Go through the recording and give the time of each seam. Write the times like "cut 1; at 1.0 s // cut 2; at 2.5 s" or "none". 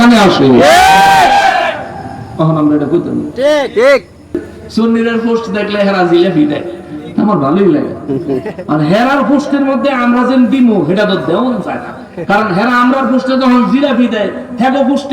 cut 1; at 4.5 s